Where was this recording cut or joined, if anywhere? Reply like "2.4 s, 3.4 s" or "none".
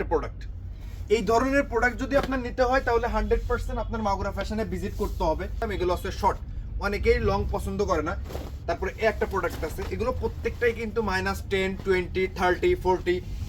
5.6 s